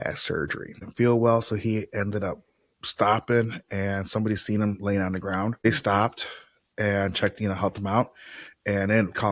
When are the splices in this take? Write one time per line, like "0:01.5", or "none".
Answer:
0:00.9
0:05.7